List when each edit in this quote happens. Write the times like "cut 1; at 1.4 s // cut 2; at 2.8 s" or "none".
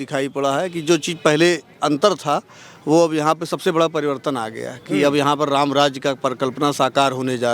none